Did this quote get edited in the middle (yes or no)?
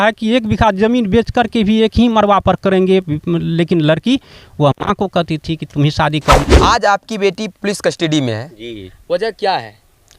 yes